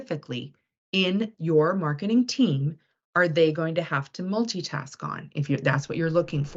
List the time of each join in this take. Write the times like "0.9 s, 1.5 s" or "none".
none